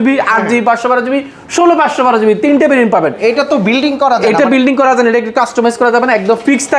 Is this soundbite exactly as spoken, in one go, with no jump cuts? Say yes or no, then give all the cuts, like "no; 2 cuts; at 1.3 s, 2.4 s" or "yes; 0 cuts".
yes; 0 cuts